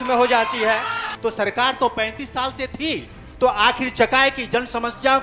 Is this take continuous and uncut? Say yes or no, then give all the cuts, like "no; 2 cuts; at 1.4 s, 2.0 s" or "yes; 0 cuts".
no; 1 cut; at 1.1 s